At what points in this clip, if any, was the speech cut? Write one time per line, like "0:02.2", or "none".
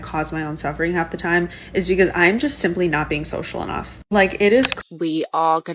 0:04.8